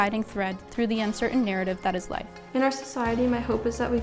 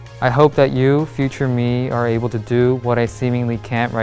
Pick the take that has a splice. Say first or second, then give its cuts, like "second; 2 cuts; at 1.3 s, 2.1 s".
first; 1 cut; at 2.4 s